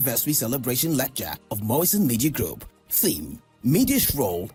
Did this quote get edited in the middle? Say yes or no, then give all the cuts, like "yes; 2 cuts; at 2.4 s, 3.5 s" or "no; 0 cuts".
no; 0 cuts